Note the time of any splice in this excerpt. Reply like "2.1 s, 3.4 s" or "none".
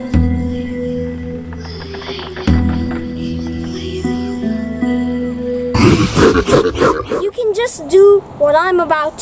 5.7 s, 7.1 s

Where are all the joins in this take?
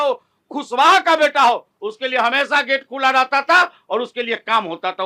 none

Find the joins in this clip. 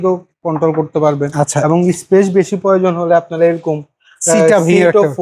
none

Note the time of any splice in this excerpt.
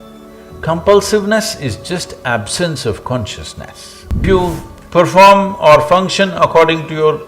4.2 s

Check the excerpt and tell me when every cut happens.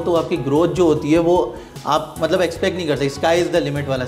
none

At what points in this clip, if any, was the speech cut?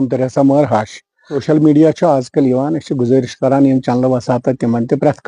1.4 s

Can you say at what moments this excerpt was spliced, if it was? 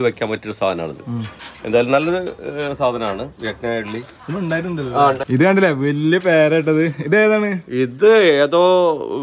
5.2 s

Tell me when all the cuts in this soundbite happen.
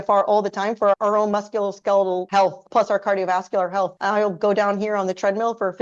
2.2 s, 4.0 s

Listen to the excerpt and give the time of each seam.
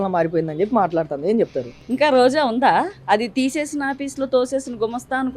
none

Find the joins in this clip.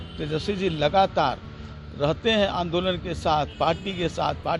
none

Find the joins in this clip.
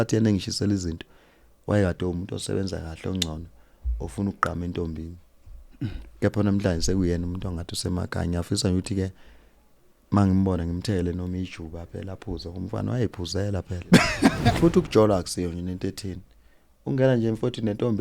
14.4 s

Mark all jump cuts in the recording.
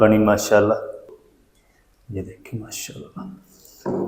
1.1 s

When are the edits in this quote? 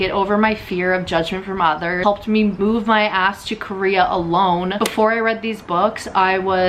4.8 s

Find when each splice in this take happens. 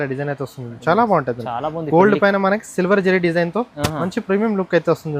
none

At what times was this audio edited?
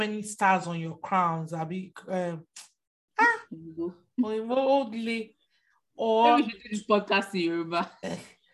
3.0 s

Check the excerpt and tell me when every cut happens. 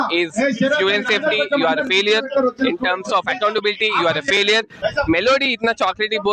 4.8 s

